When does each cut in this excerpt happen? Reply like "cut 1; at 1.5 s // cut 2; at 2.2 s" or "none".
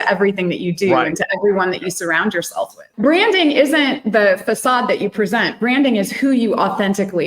cut 1; at 2.9 s